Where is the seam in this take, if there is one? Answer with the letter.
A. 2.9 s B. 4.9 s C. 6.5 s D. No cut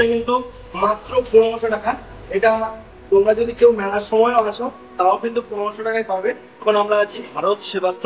C